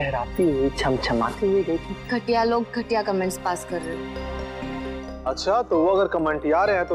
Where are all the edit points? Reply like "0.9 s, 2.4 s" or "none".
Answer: 1.9 s, 5.1 s